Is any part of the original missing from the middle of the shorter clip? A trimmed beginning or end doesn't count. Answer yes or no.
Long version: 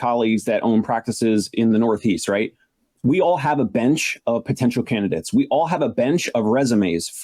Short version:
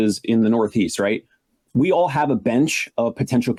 no